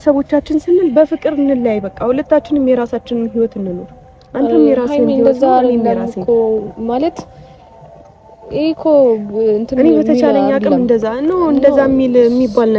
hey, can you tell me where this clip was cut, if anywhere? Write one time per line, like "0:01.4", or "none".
none

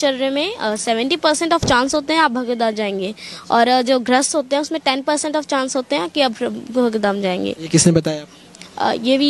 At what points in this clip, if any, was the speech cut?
none

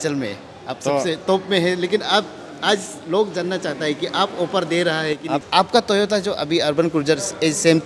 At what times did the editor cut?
0:05.5

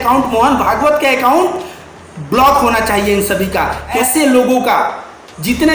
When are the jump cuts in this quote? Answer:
0:04.0

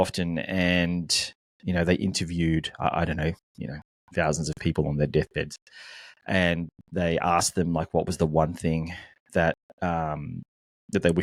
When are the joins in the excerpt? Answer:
none

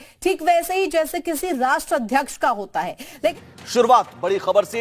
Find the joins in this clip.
0:03.3

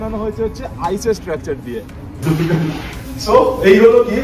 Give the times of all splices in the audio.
0:02.1

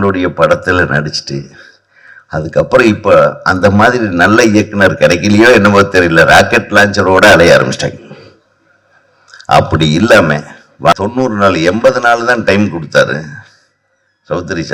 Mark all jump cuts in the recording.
0:10.9

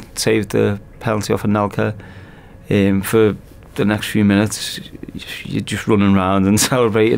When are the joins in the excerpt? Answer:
none

